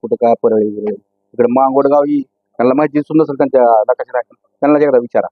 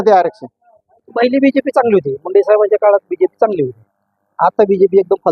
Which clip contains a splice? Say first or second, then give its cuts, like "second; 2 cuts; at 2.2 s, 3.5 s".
second; 1 cut; at 1.0 s